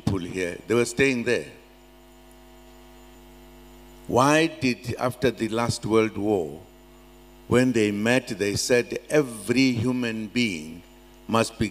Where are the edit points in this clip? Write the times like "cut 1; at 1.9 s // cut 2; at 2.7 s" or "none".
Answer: cut 1; at 3.1 s

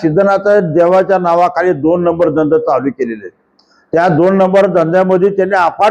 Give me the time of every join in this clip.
none

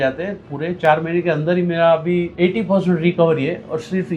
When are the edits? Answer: cut 1; at 2.3 s

